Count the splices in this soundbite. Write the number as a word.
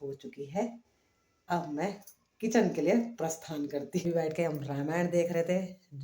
one